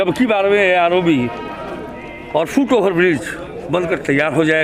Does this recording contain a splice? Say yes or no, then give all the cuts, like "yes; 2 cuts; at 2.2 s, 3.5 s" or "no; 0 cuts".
no; 0 cuts